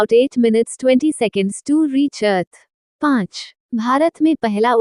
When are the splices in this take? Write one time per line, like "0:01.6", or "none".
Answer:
0:03.0